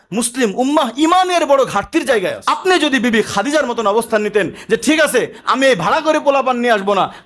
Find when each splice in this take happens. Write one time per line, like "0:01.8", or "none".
0:02.4